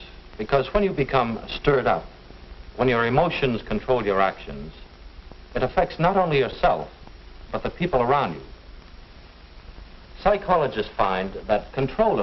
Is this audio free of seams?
no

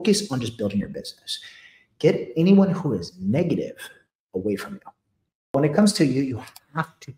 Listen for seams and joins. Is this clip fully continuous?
no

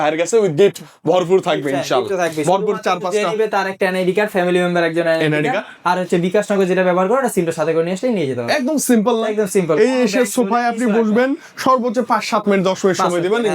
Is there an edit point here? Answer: no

